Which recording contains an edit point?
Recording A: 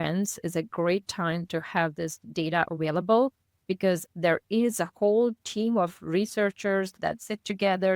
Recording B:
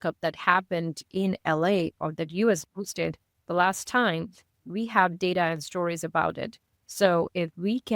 A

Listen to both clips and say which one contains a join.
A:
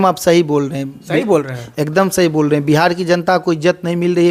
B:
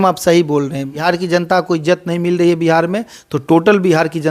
B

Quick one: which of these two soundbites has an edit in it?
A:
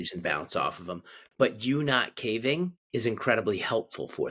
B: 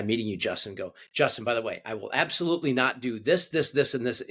A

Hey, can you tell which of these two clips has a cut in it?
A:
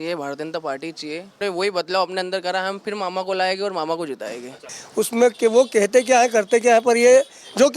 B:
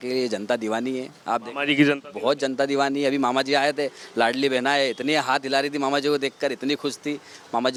A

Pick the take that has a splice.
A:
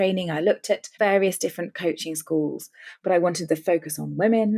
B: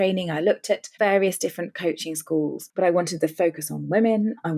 B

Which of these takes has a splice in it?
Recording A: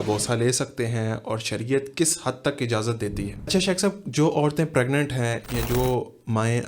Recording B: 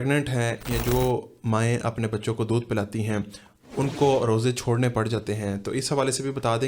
A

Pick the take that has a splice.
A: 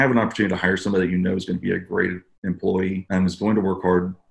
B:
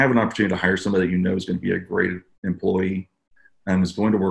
A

